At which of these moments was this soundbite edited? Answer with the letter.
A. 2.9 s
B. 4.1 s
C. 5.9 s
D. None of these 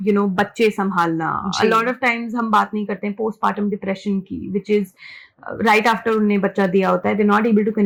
D